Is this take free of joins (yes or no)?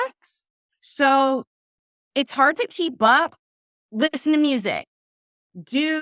yes